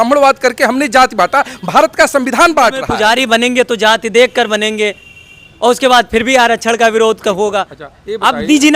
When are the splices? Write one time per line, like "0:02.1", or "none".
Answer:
0:02.8